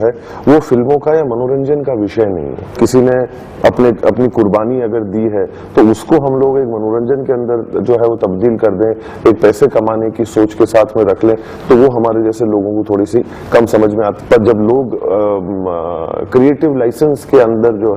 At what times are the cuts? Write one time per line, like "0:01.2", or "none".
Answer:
0:02.8
0:14.1